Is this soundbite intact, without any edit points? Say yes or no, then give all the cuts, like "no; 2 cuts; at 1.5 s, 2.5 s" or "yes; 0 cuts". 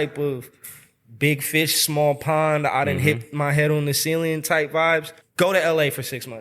no; 1 cut; at 5.2 s